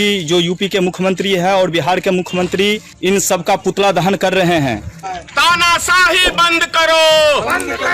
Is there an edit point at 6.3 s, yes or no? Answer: no